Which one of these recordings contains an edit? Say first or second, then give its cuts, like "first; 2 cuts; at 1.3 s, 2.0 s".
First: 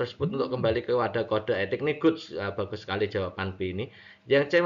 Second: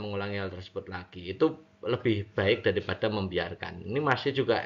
second; 1 cut; at 2.0 s